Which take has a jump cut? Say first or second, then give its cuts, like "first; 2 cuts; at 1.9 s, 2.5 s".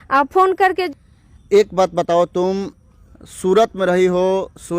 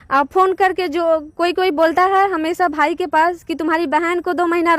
first; 1 cut; at 0.9 s